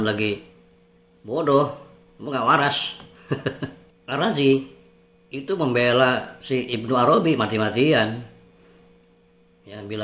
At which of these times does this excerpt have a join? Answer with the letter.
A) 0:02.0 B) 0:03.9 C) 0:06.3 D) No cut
B